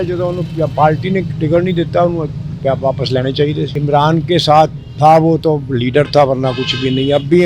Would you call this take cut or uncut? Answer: cut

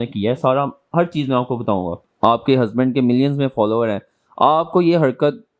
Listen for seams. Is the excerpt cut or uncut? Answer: cut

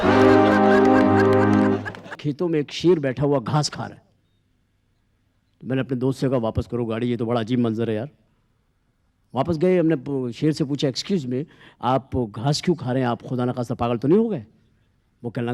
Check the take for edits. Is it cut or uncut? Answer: cut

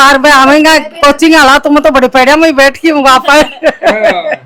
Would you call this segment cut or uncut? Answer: uncut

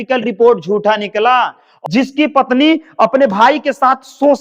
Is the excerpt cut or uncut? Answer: cut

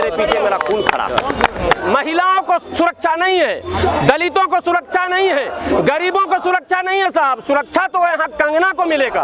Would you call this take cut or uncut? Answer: cut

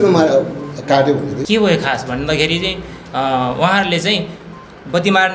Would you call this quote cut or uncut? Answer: cut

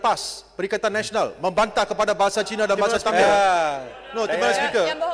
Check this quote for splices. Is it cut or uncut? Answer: cut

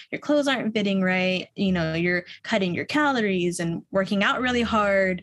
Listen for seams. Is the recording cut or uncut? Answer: cut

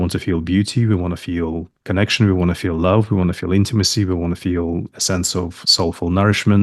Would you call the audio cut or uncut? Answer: cut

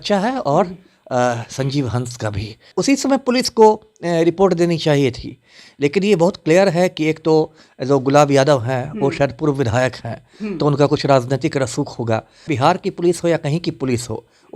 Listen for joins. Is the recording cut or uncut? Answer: cut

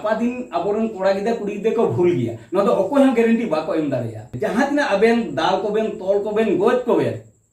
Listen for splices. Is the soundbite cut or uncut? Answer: cut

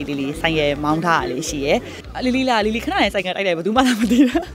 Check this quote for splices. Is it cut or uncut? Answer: cut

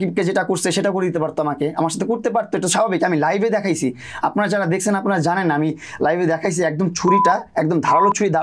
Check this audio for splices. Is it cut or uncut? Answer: uncut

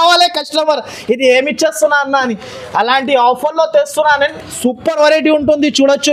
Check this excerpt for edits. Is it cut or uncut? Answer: uncut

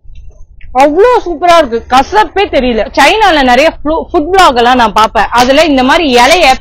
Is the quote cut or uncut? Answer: uncut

